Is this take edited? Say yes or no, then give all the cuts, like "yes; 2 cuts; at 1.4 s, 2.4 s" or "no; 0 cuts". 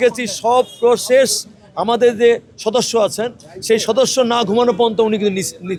no; 0 cuts